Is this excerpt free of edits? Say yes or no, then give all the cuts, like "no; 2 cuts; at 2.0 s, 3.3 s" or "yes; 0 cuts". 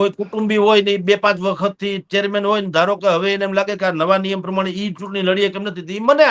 yes; 0 cuts